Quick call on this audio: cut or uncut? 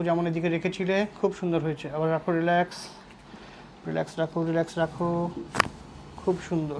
uncut